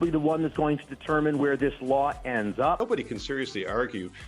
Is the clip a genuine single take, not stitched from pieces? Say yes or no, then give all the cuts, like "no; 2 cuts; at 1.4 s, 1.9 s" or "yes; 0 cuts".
no; 1 cut; at 2.8 s